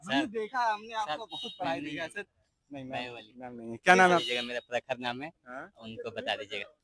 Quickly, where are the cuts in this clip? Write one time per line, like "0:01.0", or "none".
none